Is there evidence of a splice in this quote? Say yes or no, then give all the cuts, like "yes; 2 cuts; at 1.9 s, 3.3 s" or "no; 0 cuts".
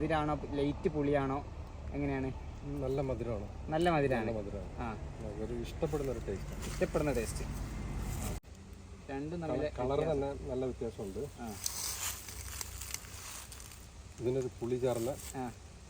yes; 1 cut; at 8.4 s